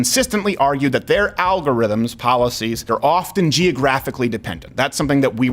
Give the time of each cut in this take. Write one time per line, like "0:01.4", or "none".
0:02.9